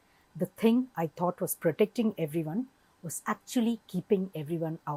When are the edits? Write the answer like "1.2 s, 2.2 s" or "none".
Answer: none